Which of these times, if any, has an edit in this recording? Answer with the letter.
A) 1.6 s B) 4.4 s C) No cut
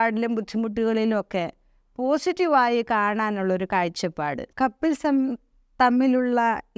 B